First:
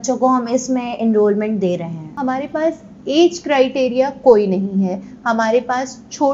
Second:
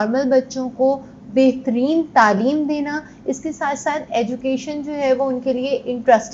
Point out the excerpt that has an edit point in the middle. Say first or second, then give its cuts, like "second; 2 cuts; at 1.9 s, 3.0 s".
first; 1 cut; at 2.1 s